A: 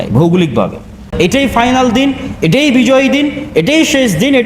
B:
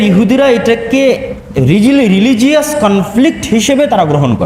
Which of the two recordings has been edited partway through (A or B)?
A